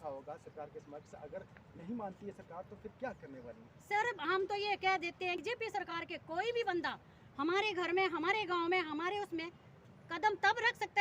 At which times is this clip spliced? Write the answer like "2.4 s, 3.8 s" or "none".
5.4 s